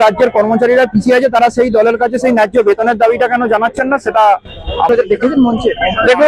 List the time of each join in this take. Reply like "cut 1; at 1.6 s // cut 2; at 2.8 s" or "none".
cut 1; at 4.9 s